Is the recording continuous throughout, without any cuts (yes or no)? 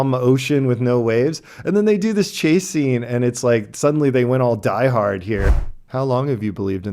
no